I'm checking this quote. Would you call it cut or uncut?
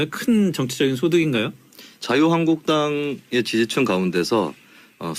uncut